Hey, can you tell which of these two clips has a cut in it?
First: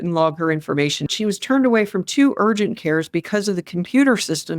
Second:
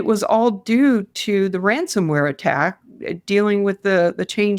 first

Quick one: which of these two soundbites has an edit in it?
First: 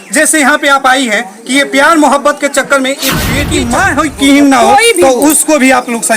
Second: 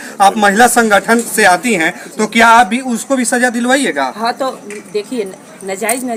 first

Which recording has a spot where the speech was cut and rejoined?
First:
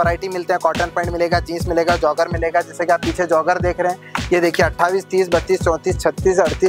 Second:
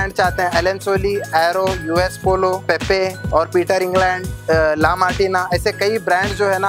second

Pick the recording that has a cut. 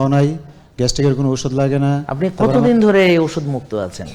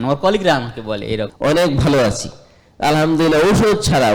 second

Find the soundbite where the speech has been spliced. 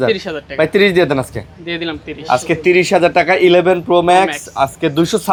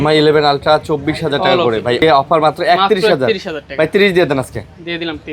second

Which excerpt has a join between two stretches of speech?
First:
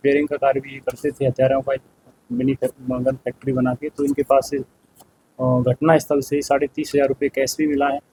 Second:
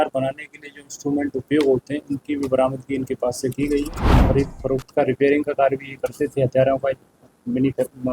second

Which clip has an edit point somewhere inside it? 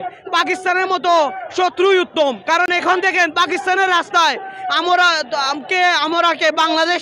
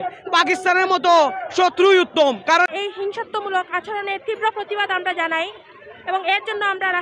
second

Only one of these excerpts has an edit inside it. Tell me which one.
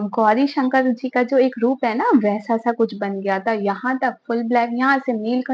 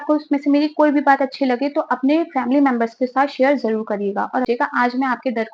second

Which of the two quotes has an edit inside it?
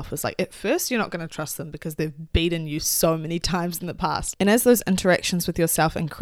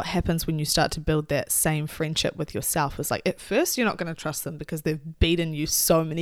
first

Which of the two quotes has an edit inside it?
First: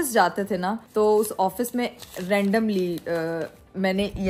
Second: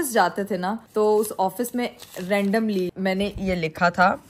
second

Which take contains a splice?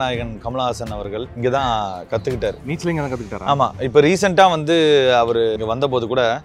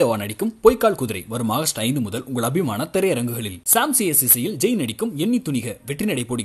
first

